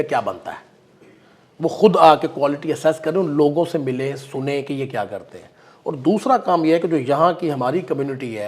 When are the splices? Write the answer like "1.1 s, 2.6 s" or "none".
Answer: none